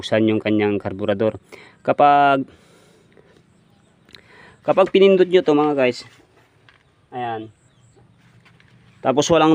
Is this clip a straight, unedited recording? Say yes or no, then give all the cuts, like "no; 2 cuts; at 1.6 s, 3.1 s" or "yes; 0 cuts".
yes; 0 cuts